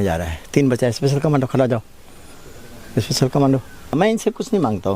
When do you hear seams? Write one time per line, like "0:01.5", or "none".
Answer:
0:03.9